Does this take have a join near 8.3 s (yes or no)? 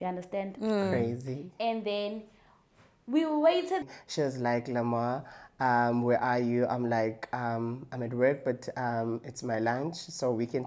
no